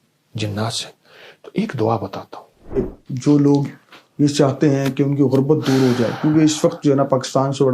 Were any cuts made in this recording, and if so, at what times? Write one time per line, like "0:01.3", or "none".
0:02.8